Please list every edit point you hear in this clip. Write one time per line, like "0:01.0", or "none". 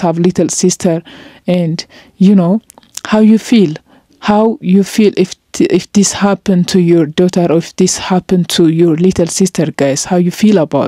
none